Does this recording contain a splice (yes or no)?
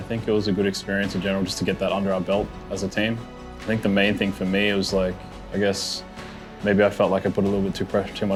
no